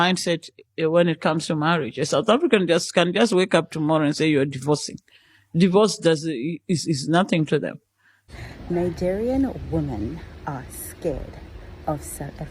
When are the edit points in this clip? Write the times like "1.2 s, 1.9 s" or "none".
8.2 s